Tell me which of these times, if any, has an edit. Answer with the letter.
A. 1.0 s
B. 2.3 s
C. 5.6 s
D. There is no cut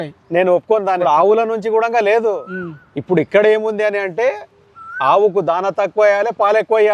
A